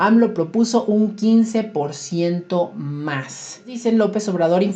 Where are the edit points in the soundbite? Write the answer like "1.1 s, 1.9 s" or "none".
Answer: 3.7 s